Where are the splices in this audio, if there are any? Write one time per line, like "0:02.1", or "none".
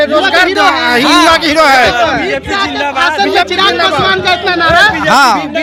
none